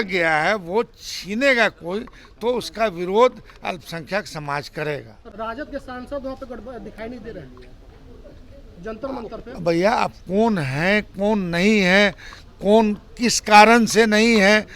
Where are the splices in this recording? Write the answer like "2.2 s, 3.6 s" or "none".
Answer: 5.2 s